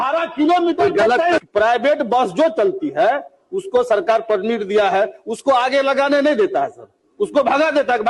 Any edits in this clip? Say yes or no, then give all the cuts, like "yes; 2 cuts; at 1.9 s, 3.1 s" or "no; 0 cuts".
yes; 1 cut; at 1.4 s